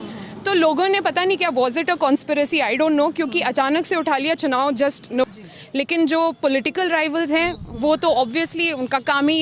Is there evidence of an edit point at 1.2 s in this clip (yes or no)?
no